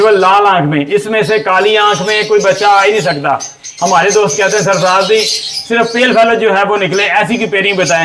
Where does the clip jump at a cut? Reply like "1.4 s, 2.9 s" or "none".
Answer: none